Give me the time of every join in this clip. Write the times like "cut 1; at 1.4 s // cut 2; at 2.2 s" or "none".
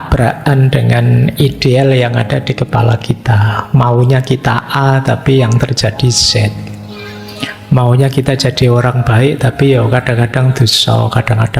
none